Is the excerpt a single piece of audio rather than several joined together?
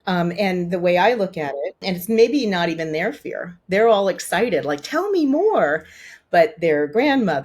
no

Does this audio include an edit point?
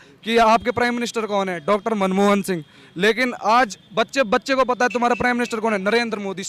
no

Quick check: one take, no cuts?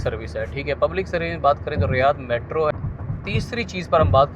no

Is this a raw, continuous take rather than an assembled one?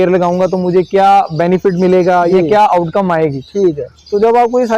yes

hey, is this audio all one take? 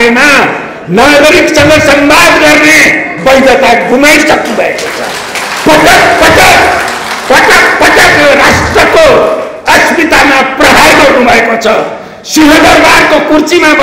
yes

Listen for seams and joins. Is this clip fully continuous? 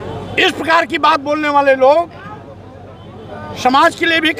yes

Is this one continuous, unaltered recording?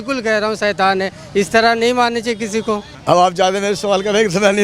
no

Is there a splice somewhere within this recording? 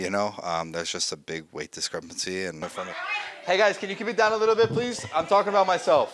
yes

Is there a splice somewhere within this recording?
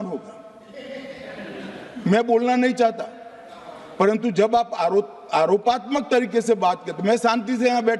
no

